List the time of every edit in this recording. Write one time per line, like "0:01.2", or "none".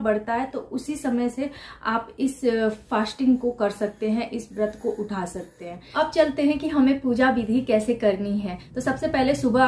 none